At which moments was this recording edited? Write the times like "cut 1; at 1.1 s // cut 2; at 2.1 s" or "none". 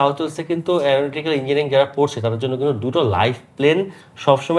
none